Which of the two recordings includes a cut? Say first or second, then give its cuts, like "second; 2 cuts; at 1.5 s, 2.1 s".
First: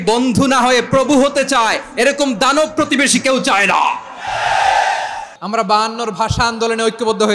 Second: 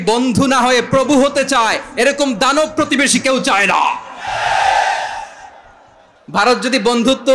first; 1 cut; at 5.3 s